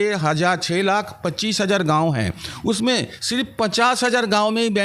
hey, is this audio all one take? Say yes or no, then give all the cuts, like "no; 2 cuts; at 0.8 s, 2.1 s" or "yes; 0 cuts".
yes; 0 cuts